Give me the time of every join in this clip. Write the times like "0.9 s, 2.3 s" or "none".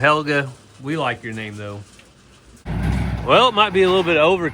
2.8 s